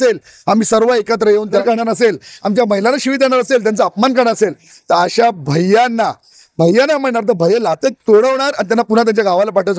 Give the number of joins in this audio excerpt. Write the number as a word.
one